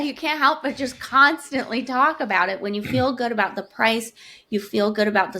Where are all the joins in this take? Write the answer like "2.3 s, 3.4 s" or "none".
none